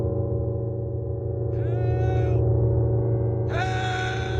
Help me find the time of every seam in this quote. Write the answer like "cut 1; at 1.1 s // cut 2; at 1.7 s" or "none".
none